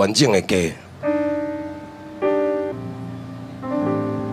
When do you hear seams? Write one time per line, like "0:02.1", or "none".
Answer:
0:02.7